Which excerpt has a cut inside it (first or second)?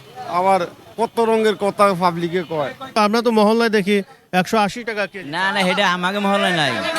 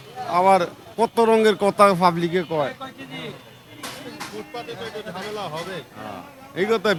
first